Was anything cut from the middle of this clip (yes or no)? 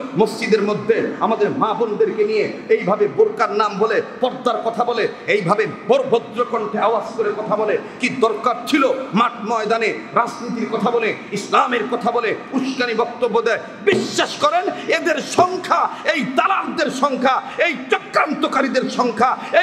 no